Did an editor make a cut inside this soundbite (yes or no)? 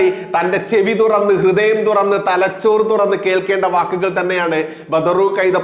no